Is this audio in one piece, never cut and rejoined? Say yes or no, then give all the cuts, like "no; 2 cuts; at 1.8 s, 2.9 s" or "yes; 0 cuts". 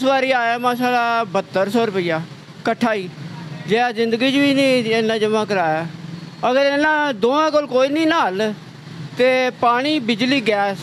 yes; 0 cuts